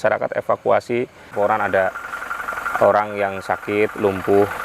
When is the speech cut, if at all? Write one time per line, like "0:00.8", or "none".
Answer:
0:01.3